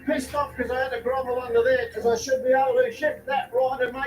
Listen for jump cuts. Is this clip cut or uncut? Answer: cut